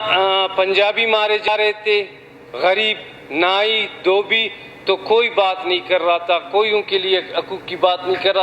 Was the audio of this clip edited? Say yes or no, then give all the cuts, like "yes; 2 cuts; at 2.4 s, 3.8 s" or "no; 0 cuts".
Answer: yes; 1 cut; at 1.5 s